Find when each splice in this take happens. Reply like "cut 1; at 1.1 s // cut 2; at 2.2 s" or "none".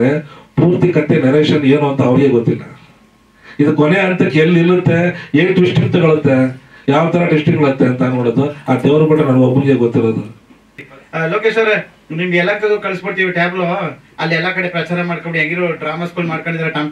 cut 1; at 10.8 s